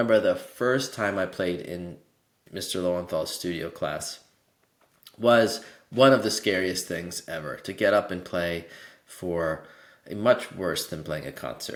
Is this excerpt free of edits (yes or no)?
yes